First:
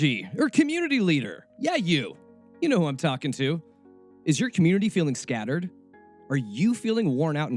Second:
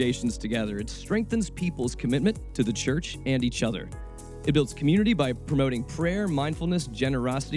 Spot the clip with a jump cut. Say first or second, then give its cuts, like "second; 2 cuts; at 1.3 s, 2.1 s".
first; 1 cut; at 1.4 s